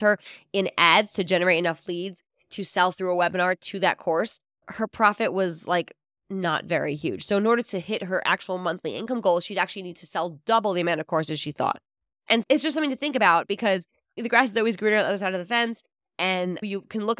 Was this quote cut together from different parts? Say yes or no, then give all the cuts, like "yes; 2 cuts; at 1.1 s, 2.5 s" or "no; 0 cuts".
yes; 1 cut; at 14.1 s